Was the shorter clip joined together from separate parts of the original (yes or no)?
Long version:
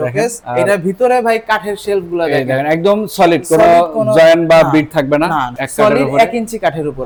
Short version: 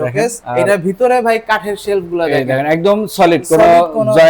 no